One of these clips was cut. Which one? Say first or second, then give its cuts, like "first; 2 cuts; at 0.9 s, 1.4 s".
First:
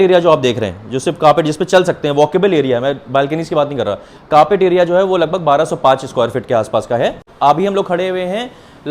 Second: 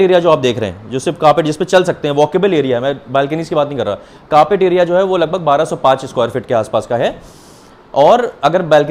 first; 1 cut; at 7.3 s